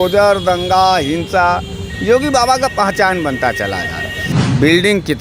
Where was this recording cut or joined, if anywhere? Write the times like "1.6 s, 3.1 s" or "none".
4.3 s